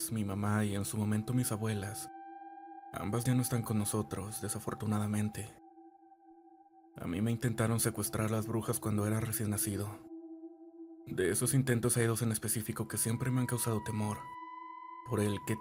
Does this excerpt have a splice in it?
no; 0 cuts

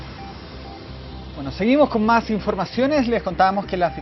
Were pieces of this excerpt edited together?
no; 0 cuts

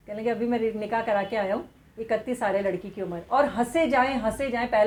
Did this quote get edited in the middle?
no; 0 cuts

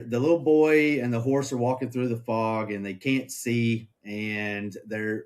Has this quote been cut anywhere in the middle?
no; 0 cuts

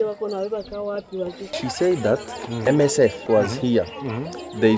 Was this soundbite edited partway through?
yes; 2 cuts; at 1.5 s, 2.6 s

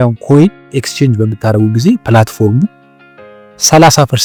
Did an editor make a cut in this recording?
no; 0 cuts

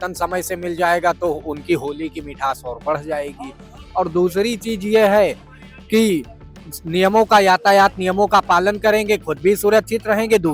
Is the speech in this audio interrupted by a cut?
no; 0 cuts

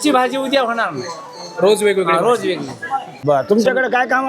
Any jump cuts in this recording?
yes; 1 cut; at 3.1 s

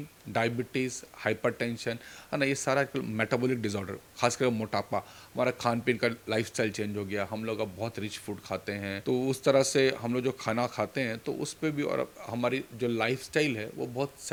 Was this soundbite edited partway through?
no; 0 cuts

